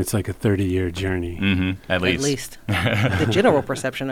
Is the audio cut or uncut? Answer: cut